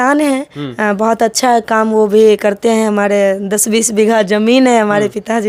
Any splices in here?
no; 0 cuts

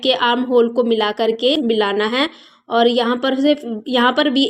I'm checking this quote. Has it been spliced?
yes; 1 cut; at 1.5 s

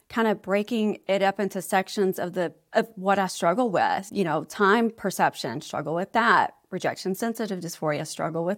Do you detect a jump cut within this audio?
yes; 1 cut; at 4.1 s

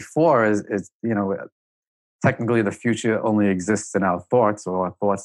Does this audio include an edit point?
no; 0 cuts

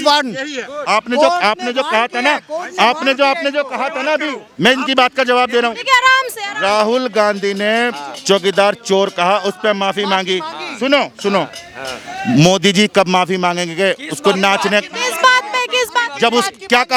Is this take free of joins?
yes; 0 cuts

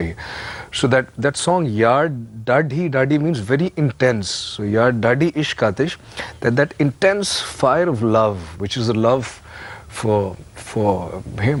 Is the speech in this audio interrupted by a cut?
no; 0 cuts

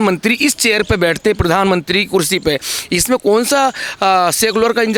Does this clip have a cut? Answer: no; 0 cuts

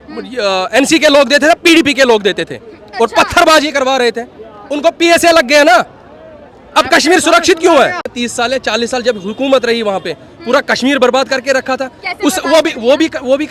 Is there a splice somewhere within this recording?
yes; 1 cut; at 8.1 s

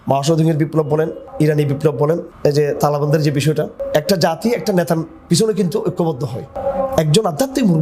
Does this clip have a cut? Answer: yes; 4 cuts; at 1.2 s, 2.3 s, 3.8 s, 6.5 s

